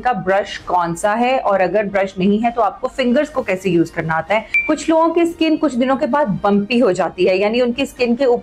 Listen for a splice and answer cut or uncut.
uncut